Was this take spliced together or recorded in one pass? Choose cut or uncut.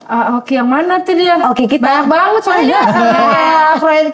uncut